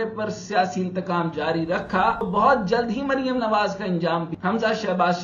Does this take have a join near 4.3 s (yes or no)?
yes